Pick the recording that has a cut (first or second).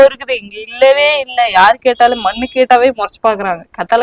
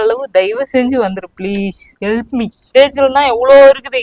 second